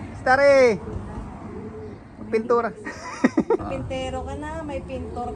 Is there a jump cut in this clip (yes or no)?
yes